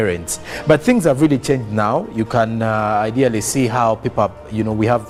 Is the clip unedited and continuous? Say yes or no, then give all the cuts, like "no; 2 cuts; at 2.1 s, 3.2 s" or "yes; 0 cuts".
yes; 0 cuts